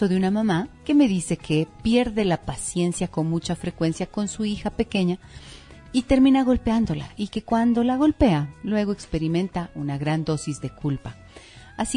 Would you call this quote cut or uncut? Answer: cut